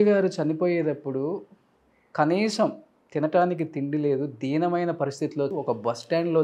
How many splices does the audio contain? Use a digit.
1